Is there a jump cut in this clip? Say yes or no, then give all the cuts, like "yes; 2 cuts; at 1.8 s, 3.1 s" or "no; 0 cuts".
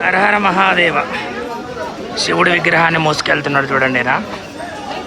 no; 0 cuts